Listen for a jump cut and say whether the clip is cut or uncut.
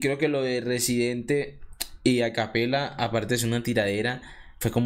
uncut